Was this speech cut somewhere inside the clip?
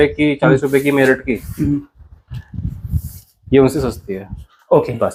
no; 0 cuts

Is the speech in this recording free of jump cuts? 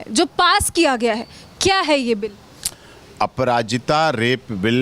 yes; 0 cuts

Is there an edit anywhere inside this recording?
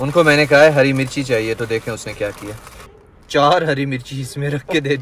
no; 0 cuts

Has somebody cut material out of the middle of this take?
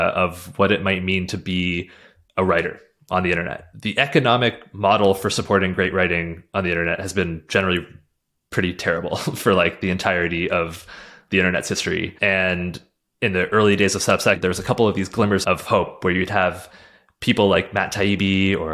yes; 1 cut; at 3.8 s

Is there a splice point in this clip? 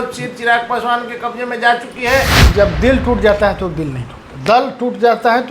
yes; 1 cut; at 2.4 s

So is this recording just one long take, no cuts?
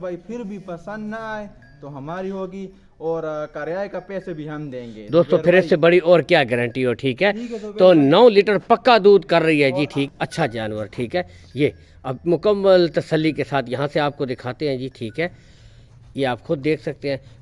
no; 1 cut; at 10.1 s

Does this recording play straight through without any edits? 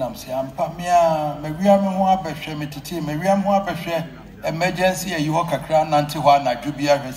yes; 0 cuts

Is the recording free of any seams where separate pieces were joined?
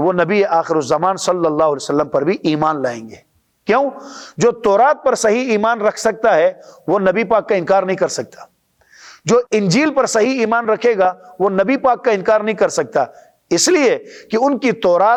yes; 0 cuts

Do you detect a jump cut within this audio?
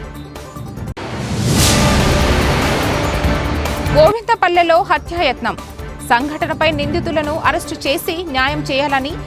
no; 0 cuts

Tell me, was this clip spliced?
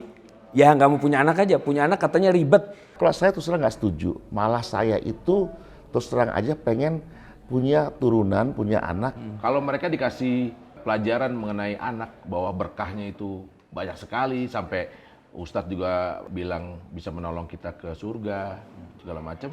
yes; 2 cuts; at 3.0 s, 9.2 s

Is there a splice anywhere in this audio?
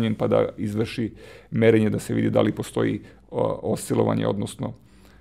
no; 0 cuts

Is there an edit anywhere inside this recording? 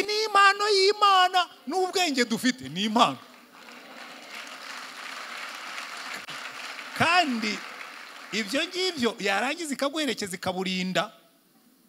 no; 0 cuts

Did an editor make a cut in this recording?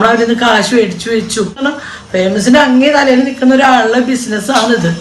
yes; 1 cut; at 1.7 s

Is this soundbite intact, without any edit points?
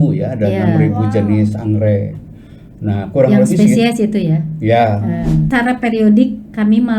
no; 1 cut; at 5.5 s

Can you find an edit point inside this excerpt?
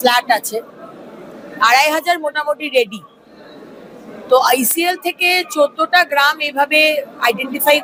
no; 0 cuts

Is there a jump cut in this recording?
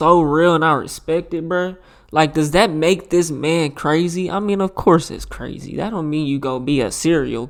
no; 0 cuts

